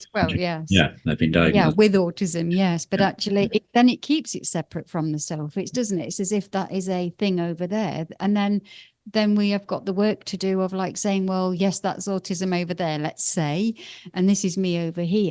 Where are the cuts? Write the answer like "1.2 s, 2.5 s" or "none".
none